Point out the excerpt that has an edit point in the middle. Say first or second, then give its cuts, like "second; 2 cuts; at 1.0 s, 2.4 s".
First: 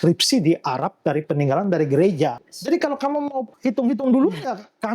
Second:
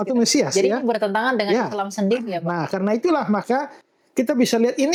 first; 2 cuts; at 2.5 s, 3.5 s